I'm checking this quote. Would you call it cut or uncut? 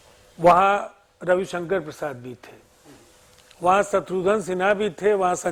uncut